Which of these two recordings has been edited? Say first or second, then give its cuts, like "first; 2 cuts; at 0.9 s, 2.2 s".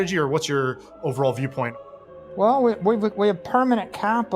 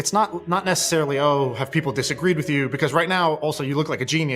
first; 1 cut; at 1.9 s